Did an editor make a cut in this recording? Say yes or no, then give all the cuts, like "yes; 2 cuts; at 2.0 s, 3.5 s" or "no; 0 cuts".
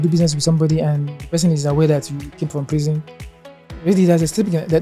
no; 0 cuts